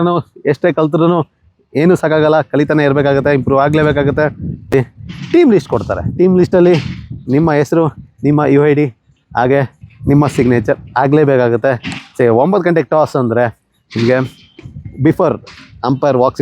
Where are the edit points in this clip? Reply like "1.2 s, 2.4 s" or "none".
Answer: 4.7 s